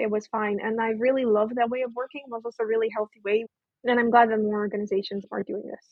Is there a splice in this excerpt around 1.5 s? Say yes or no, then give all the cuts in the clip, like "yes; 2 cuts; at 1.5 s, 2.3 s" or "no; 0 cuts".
no; 1 cut; at 3.5 s